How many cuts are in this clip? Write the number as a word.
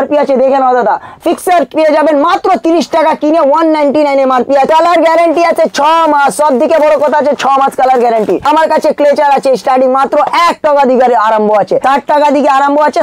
four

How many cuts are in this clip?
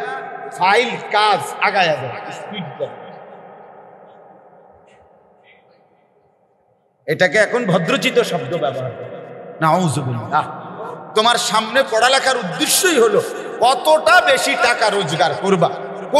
one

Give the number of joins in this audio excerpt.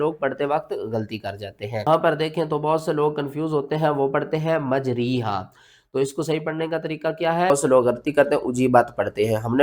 one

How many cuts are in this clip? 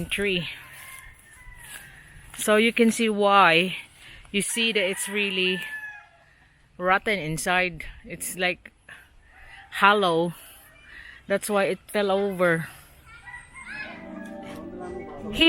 one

